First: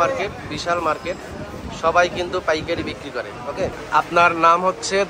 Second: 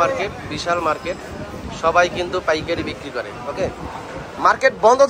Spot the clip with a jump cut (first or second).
first